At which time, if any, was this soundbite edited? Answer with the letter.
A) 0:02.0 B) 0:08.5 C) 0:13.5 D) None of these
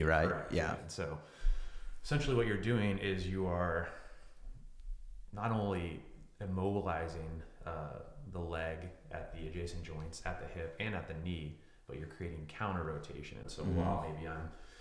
C